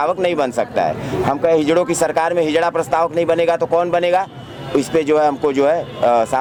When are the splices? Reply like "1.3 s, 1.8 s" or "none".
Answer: none